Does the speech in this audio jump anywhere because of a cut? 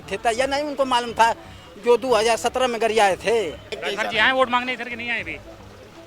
yes; 1 cut; at 3.7 s

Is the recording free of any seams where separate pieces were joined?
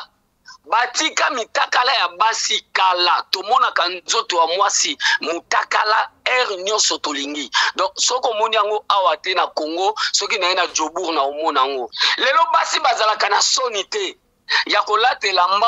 no; 1 cut; at 12.0 s

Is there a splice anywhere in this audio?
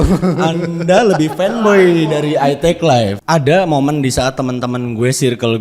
yes; 1 cut; at 3.2 s

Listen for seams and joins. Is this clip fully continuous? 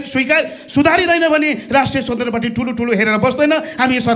yes; 0 cuts

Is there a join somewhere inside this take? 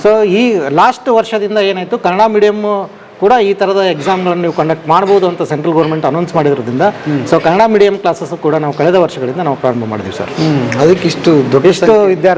no; 0 cuts

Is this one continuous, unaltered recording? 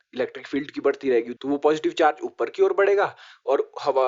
no; 1 cut; at 1.3 s

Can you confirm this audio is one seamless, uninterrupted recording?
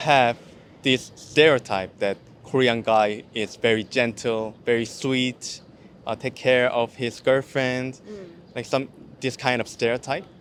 yes; 0 cuts

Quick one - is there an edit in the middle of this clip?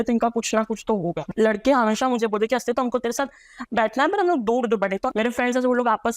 yes; 2 cuts; at 1.2 s, 5.1 s

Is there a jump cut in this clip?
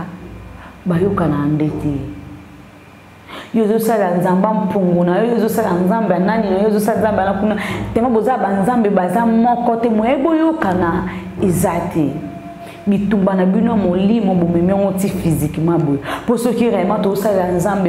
no; 0 cuts

